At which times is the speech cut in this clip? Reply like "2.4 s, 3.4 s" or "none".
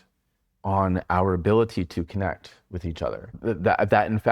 3.3 s

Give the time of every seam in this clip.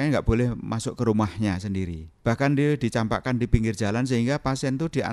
2.0 s

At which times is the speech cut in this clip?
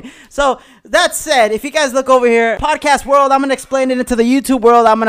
2.6 s

